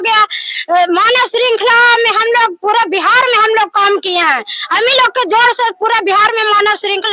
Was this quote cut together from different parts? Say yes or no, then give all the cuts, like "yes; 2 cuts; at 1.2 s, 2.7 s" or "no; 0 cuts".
no; 0 cuts